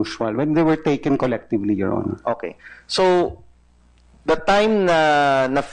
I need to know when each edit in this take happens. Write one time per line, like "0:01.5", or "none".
0:02.9